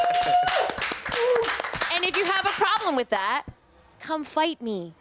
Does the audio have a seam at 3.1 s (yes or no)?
no